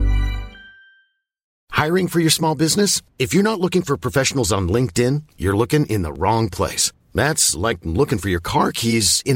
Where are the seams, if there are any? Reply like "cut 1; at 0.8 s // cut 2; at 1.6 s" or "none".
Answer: none